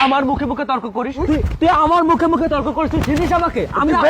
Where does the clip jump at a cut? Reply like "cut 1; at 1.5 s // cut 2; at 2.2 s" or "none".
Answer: cut 1; at 1.1 s